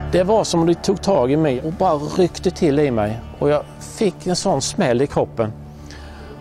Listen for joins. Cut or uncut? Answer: cut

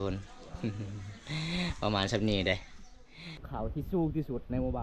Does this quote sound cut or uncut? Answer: cut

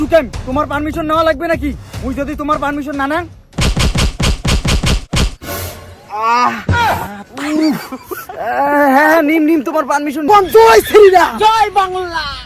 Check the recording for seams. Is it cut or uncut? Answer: cut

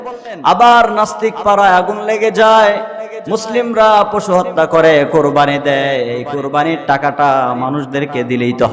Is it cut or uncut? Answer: uncut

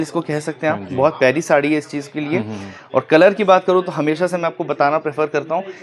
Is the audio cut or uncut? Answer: uncut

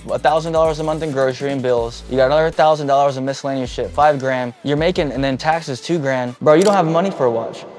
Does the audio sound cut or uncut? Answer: cut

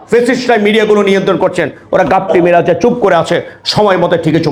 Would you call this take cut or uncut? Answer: uncut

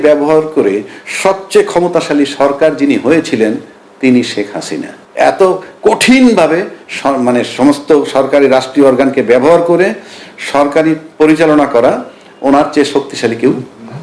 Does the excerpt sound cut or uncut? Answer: uncut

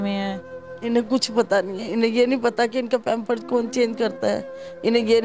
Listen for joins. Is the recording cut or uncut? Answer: uncut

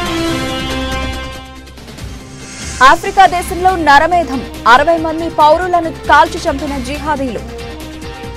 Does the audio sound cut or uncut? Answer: uncut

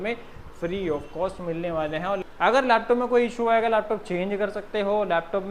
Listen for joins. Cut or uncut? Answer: cut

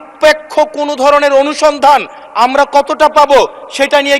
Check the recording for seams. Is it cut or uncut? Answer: cut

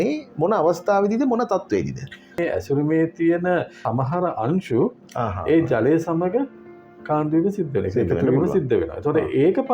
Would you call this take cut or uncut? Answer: cut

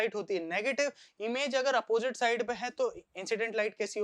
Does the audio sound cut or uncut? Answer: uncut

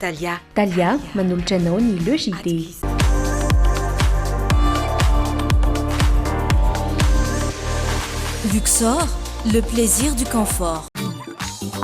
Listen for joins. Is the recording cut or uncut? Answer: cut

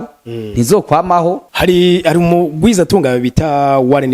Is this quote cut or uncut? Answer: cut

